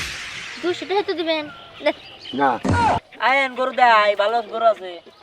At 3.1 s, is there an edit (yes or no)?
yes